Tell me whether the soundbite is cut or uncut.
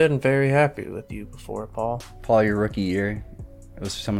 cut